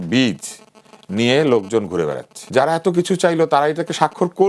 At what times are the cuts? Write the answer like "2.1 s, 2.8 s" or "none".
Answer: 2.3 s